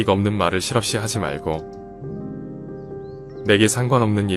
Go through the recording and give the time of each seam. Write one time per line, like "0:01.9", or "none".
0:01.6
0:03.2